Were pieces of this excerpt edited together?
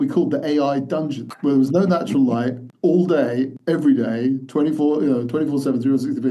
yes; 3 cuts; at 1.2 s, 2.6 s, 3.6 s

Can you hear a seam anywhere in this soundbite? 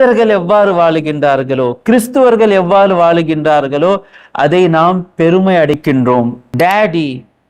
yes; 1 cut; at 6.4 s

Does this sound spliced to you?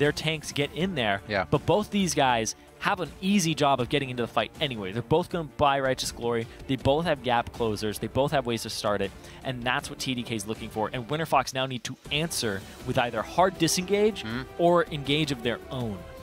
no; 0 cuts

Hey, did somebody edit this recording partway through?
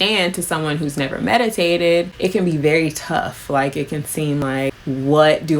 yes; 2 cuts; at 2.1 s, 4.4 s

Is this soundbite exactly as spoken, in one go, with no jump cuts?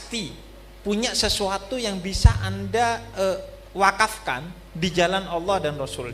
yes; 0 cuts

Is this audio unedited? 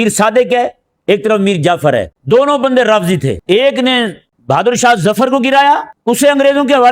no; 4 cuts; at 2.1 s, 3.4 s, 4.3 s, 5.9 s

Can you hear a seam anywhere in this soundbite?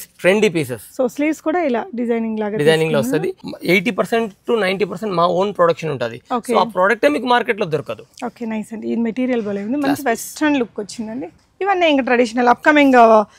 yes; 2 cuts; at 3.5 s, 11.4 s

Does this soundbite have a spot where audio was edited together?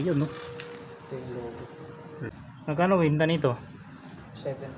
yes; 1 cut; at 2.3 s

